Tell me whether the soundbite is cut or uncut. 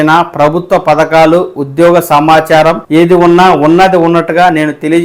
cut